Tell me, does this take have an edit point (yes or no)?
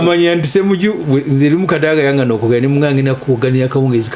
no